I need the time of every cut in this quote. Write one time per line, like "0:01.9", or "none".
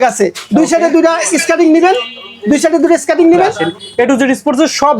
0:03.7